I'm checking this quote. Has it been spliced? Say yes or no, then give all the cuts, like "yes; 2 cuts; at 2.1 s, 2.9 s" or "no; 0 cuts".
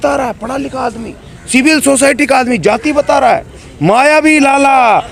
no; 0 cuts